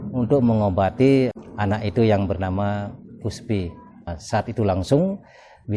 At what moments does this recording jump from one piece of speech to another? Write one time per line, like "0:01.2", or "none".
0:01.3
0:04.2